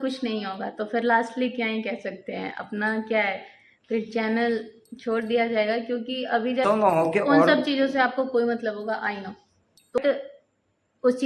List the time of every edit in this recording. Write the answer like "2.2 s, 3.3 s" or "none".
6.6 s, 10.0 s